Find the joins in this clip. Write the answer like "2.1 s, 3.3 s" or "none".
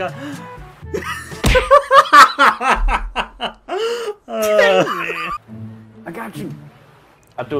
5.3 s